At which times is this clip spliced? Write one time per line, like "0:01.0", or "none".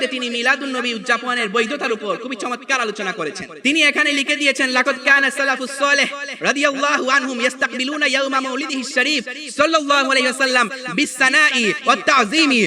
0:03.5